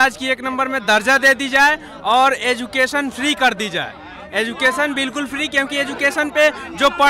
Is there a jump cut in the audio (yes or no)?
no